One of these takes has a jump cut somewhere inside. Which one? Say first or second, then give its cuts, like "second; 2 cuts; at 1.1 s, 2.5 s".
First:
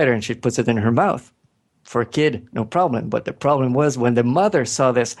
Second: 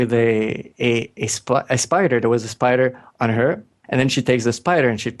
second; 1 cut; at 3.8 s